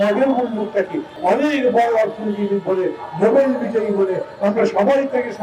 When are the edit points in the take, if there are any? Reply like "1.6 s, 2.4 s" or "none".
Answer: 1.1 s